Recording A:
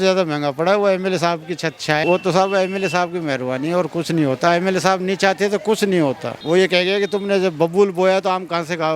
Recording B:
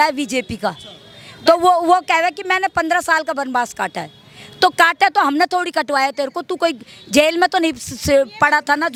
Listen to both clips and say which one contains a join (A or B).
A